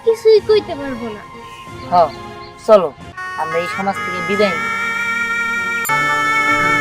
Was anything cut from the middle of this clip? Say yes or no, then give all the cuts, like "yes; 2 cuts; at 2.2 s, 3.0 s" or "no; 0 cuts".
yes; 1 cut; at 5.9 s